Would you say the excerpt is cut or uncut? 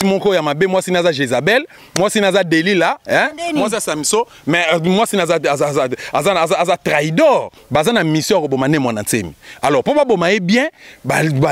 cut